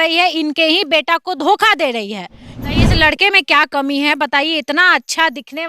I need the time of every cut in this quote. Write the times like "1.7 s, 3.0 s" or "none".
2.5 s